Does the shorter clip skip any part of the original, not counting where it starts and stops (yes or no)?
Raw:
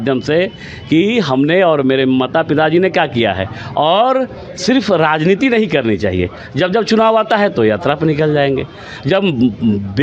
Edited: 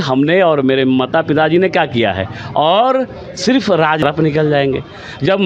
yes